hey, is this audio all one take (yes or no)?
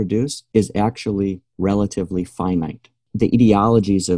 no